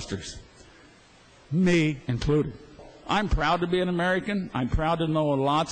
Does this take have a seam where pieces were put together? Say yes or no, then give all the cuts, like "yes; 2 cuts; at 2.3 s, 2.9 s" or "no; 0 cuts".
yes; 1 cut; at 2.9 s